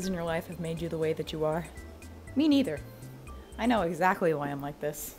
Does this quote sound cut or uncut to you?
uncut